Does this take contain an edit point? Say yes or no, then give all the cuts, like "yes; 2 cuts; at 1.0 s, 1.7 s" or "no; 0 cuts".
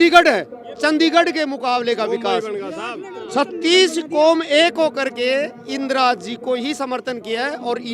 no; 0 cuts